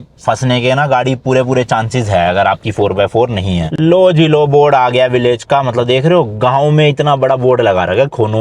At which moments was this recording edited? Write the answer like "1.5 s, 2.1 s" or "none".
3.8 s